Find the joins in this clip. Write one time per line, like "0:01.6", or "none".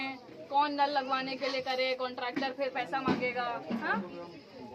none